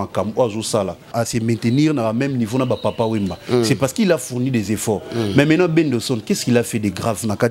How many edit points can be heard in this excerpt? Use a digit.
1